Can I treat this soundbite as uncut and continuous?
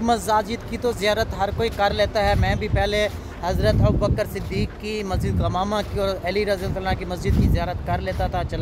yes; 0 cuts

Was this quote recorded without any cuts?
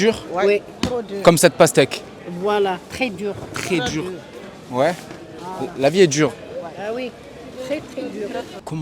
yes; 0 cuts

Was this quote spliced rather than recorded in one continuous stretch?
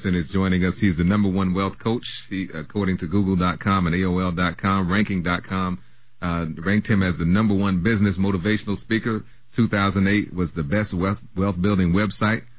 no; 0 cuts

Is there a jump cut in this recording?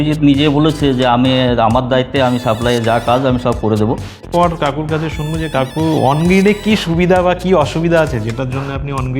yes; 1 cut; at 4.3 s

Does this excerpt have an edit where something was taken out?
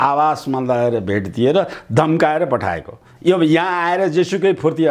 no; 0 cuts

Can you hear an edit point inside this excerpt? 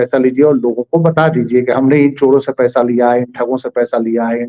no; 0 cuts

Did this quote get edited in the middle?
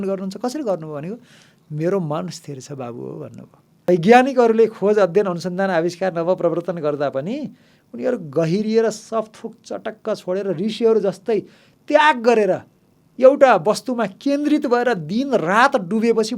yes; 1 cut; at 3.9 s

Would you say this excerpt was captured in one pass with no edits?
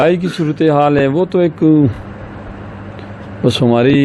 yes; 0 cuts

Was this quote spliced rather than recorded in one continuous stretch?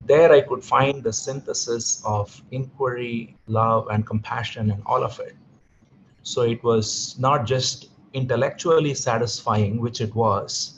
yes; 1 cut; at 3.4 s

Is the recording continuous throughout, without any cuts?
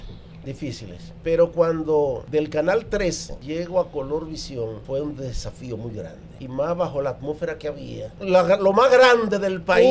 no; 6 cuts; at 1.1 s, 2.2 s, 3.3 s, 4.8 s, 6.3 s, 8.1 s

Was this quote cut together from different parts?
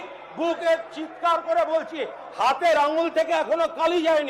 no; 0 cuts

